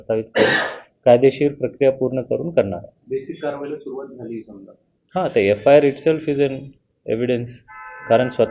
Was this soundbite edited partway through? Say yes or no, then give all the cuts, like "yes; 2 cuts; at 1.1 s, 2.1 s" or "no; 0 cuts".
no; 0 cuts